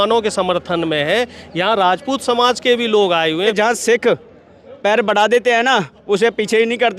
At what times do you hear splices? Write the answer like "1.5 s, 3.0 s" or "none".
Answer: 3.5 s